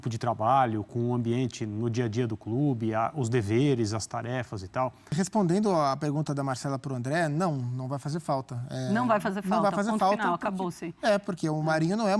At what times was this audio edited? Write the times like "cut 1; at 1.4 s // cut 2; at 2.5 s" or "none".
cut 1; at 5.2 s